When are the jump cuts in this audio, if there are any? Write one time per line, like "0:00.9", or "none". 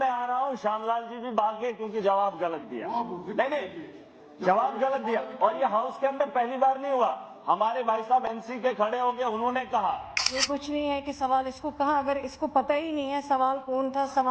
0:10.3

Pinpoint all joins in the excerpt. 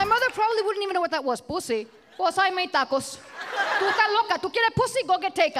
0:02.0
0:03.8

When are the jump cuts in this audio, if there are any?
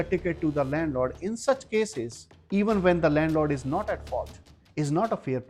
none

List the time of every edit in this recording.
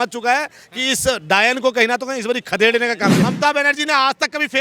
0:03.2

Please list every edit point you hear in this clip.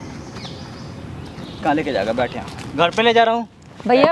0:01.4

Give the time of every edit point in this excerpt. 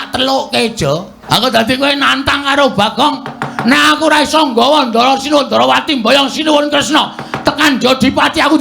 0:01.1

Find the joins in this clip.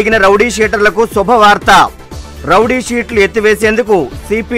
none

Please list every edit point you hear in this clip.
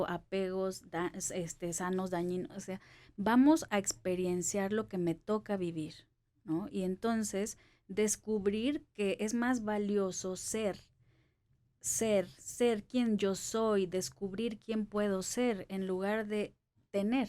none

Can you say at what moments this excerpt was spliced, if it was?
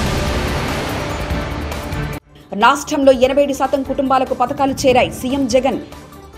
0:02.2

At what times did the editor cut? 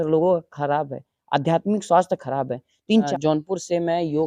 0:03.1

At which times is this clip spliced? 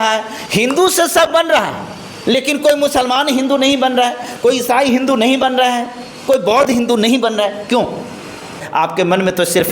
0:08.6

